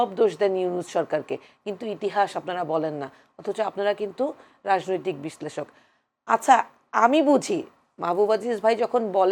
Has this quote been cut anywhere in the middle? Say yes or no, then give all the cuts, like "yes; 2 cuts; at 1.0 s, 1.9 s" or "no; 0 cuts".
no; 0 cuts